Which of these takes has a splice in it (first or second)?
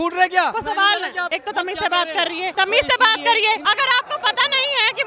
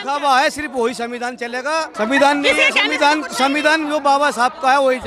first